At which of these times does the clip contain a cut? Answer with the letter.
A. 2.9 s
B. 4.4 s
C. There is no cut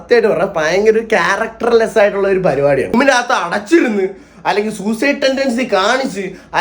A